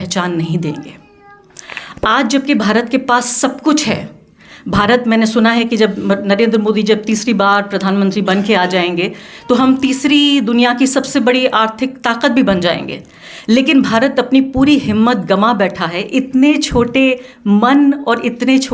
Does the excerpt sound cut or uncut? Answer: uncut